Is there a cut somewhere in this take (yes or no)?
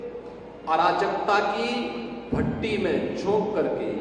no